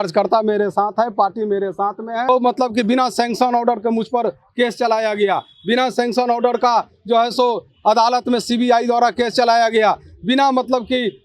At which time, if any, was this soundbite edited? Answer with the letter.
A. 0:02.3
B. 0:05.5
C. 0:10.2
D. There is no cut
A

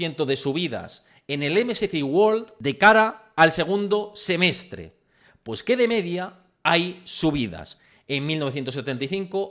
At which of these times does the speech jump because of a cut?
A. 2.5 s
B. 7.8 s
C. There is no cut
A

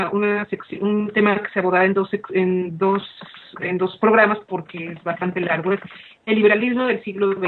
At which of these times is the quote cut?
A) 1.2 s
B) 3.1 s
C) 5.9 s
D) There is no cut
C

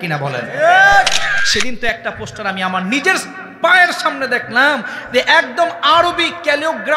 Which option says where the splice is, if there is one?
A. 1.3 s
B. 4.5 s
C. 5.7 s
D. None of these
A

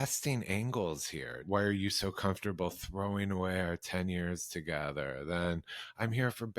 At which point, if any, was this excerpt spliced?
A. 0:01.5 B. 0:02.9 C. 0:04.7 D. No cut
A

